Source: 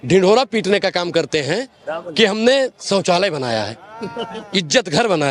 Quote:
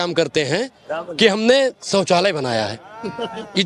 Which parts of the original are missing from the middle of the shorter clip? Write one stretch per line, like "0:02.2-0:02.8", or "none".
none